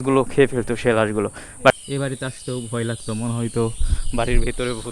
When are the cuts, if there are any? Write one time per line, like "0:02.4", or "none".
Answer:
0:01.7